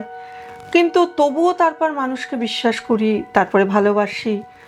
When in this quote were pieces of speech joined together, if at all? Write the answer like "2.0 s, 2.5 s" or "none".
none